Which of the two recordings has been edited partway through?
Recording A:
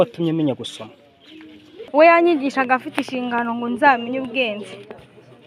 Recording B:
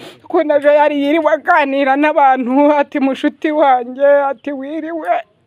A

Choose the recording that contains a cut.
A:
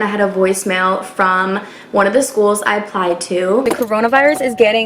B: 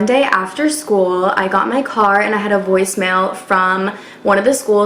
A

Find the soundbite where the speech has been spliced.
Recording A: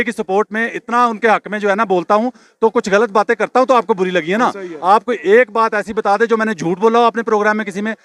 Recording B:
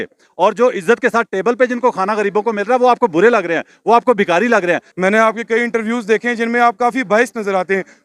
B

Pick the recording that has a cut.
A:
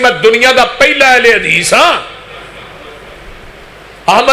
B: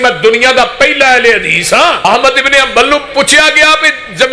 B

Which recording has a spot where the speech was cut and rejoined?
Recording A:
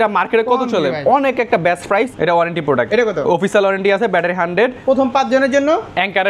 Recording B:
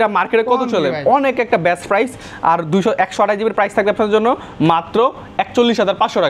A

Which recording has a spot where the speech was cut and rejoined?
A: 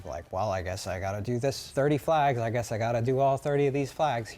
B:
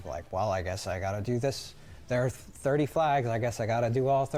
A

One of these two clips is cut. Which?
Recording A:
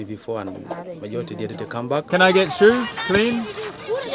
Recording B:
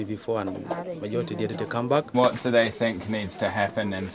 A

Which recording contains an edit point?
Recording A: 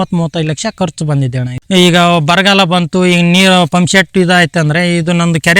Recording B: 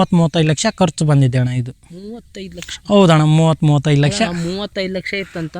A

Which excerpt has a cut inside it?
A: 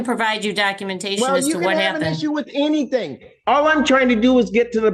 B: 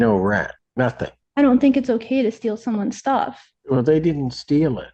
B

